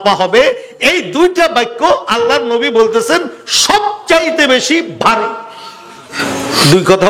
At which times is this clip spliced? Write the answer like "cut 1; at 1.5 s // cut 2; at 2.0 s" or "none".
cut 1; at 6.2 s